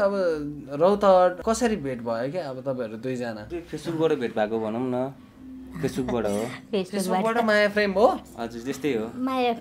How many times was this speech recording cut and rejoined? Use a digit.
2